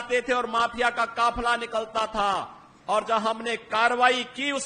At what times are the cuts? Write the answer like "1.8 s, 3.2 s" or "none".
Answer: none